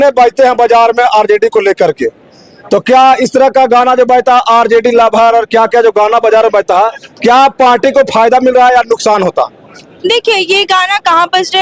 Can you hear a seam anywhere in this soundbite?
no; 0 cuts

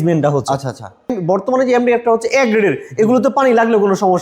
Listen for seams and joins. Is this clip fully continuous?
no; 1 cut; at 1.2 s

